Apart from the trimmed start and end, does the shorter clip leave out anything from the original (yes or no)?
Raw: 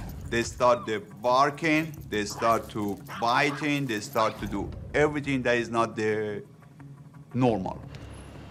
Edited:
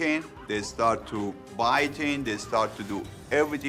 no